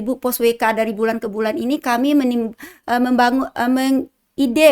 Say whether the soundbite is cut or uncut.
uncut